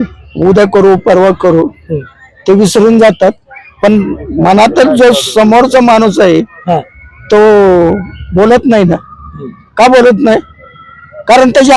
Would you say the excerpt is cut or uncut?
uncut